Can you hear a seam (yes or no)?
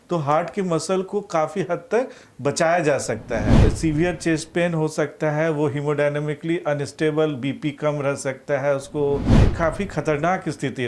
yes